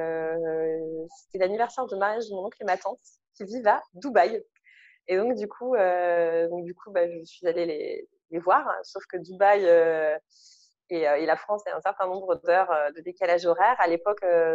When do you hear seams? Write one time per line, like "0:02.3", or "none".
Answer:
none